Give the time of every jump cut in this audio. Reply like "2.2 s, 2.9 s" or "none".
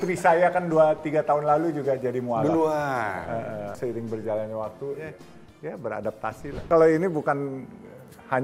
3.8 s, 5.1 s, 6.6 s